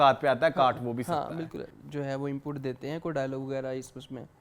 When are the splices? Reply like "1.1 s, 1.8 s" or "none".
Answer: 1.7 s